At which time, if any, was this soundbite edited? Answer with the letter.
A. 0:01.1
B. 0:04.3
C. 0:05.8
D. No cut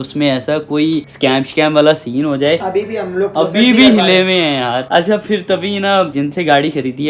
D